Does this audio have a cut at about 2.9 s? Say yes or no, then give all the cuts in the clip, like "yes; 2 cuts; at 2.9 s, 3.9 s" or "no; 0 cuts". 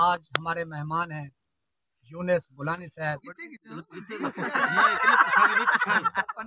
yes; 1 cut; at 2.9 s